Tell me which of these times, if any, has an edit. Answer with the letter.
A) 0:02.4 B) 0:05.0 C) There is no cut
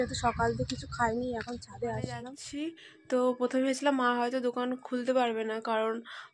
A